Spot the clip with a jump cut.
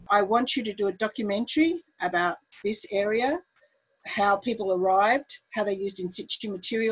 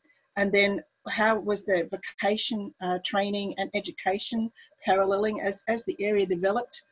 second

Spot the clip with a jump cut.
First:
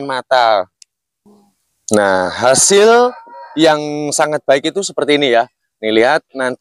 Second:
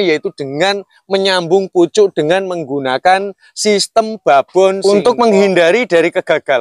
second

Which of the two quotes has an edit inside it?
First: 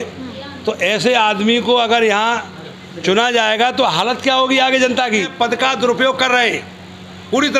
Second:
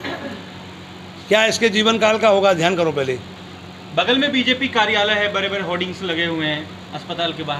first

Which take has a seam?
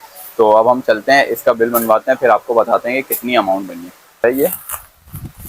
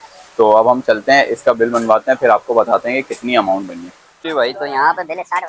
first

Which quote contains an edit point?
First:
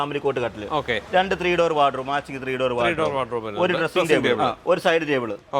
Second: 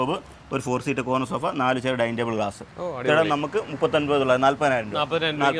first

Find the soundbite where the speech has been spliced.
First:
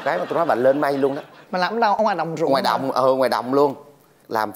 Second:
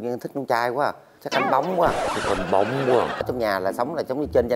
second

